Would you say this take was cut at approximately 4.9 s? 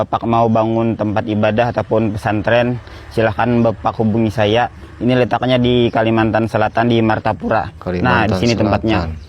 no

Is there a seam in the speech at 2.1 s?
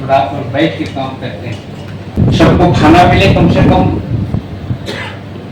yes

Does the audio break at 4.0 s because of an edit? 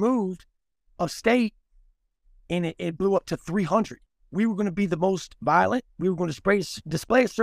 yes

